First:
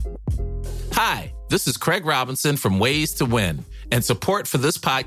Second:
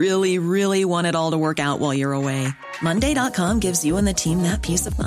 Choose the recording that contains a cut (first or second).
first